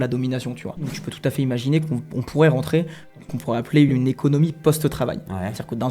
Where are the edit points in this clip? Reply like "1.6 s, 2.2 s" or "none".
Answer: 1.0 s, 3.9 s